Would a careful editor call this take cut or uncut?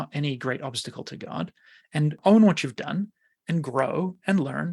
cut